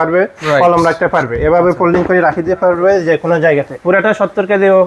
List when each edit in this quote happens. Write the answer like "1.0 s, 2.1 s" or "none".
3.7 s